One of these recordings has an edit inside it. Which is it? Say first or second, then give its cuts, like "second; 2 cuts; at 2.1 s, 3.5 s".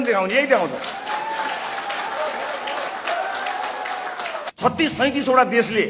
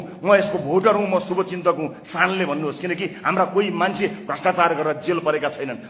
first; 1 cut; at 4.5 s